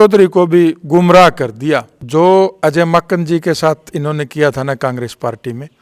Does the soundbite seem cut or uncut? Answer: cut